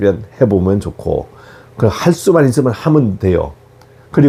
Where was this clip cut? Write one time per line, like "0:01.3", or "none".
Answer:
none